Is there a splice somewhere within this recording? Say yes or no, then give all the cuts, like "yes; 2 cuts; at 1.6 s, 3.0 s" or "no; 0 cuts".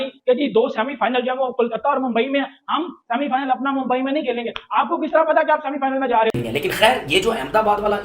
yes; 1 cut; at 6.3 s